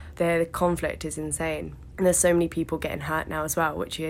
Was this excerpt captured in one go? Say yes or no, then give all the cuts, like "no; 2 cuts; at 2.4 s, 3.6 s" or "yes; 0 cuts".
no; 1 cut; at 1.8 s